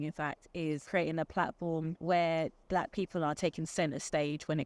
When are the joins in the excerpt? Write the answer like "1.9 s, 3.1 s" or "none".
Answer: 0.8 s, 1.9 s, 2.6 s